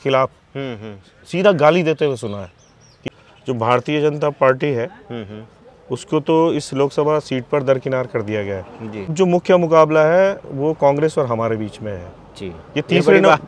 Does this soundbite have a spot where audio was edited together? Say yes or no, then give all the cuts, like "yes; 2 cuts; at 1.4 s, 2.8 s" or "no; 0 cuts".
yes; 2 cuts; at 3.0 s, 9.1 s